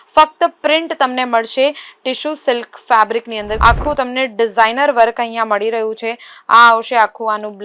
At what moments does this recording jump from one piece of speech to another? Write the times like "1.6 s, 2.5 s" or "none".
3.5 s